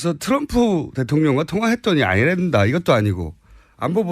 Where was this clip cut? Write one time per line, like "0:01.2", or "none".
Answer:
0:02.5